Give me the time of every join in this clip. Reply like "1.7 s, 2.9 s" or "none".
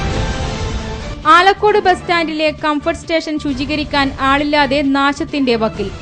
1.0 s